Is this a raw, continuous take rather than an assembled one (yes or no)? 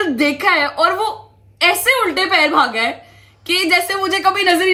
yes